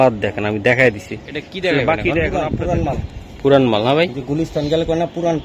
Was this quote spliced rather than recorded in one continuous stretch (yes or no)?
yes